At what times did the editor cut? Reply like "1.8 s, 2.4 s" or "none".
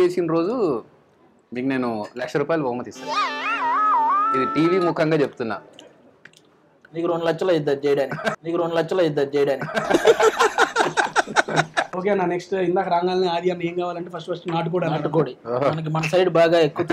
none